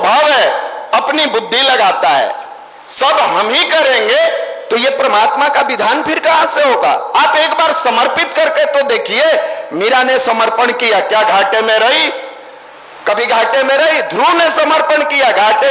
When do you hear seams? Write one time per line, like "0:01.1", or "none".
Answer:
none